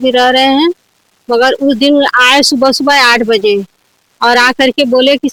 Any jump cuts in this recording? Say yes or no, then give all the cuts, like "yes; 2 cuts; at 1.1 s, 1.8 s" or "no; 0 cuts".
no; 0 cuts